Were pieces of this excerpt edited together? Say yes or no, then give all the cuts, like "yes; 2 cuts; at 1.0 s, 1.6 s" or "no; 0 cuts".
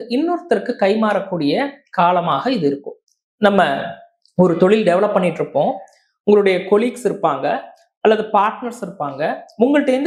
no; 0 cuts